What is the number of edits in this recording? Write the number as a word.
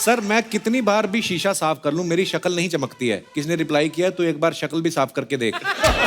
one